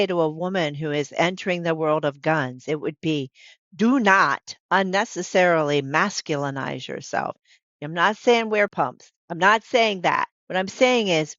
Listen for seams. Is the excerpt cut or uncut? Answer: cut